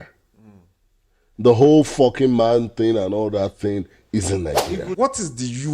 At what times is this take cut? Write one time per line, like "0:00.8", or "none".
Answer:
0:04.8